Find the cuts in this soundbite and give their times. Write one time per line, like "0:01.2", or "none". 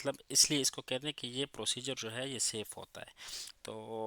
none